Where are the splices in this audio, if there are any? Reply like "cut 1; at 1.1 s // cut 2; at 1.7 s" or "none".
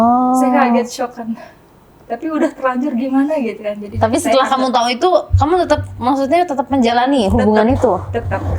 none